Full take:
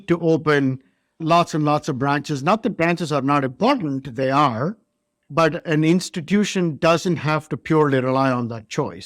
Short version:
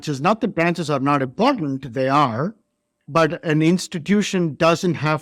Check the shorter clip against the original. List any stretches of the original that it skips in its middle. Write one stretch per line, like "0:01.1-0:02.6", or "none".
none

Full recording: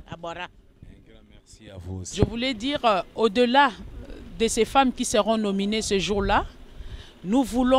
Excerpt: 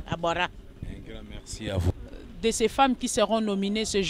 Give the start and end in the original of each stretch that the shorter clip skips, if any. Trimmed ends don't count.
0:01.9-0:03.9

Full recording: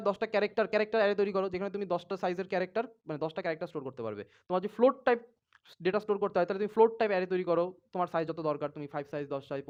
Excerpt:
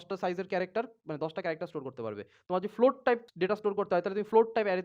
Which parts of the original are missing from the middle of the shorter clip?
0:05.3-0:05.7

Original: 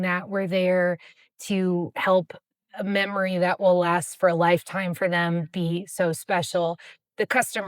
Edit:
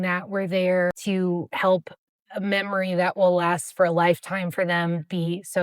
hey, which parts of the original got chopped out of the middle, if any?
0:01.0-0:01.4

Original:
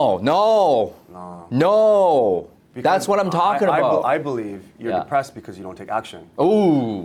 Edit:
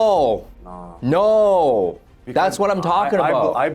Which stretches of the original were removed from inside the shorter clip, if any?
none

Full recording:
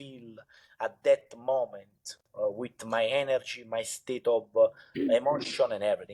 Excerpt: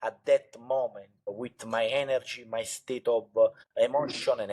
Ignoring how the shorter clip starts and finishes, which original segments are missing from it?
0:02.2-0:02.6
0:04.9-0:05.1

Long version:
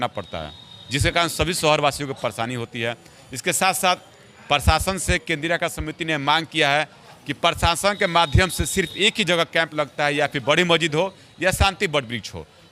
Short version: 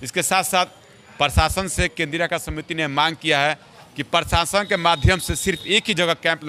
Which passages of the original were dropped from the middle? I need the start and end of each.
none

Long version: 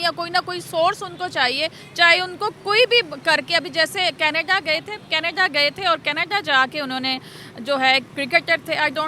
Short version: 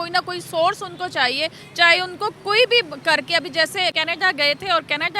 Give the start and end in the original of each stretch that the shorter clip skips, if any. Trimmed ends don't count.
0:04.1-0:05.1

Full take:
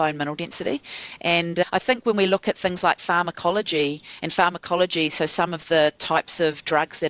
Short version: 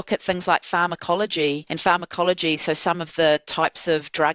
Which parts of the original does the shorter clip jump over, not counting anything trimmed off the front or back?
0:04.0-0:04.2

